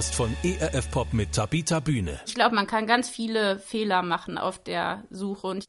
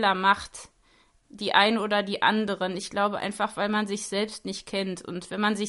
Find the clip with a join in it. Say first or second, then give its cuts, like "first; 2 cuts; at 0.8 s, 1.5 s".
first; 1 cut; at 2.2 s